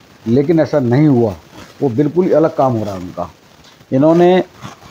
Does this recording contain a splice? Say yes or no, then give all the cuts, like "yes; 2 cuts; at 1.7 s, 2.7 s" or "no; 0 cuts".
no; 0 cuts